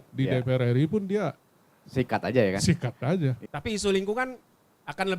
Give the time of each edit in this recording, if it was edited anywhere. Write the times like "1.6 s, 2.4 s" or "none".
3.4 s

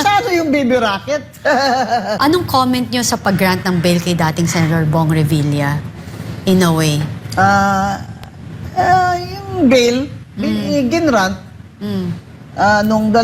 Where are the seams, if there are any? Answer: 2.2 s

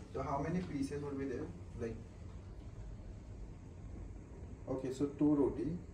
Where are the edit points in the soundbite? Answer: none

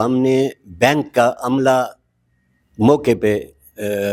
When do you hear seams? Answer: none

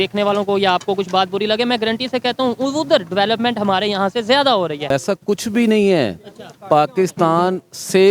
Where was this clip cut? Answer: 4.9 s

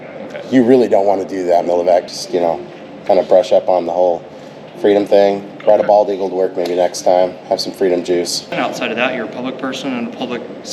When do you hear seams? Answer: 2.2 s, 8.5 s

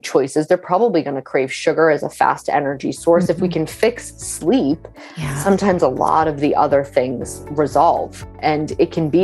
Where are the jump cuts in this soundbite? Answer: 8.3 s

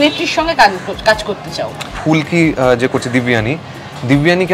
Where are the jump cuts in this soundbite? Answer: 1.9 s

